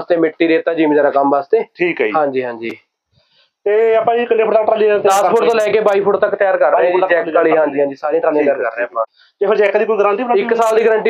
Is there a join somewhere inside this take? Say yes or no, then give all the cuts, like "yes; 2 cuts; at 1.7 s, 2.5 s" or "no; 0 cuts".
yes; 1 cut; at 9.2 s